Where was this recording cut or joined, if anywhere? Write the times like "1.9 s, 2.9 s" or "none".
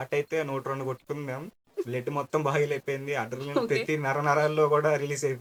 none

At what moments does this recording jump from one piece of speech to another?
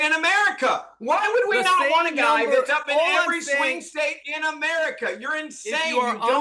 none

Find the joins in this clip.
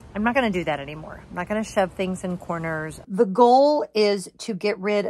2.9 s

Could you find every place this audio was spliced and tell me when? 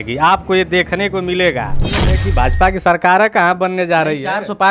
2.2 s

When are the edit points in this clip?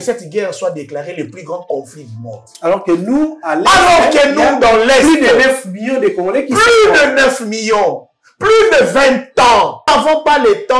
9.8 s

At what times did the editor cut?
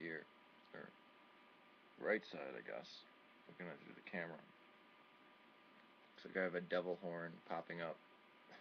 7.1 s

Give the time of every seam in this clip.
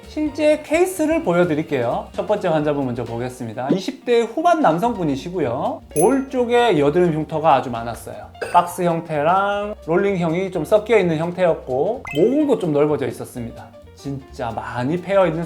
none

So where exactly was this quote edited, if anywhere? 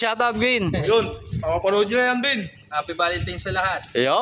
none

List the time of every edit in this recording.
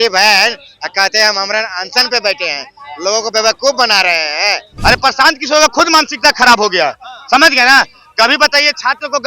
4.7 s

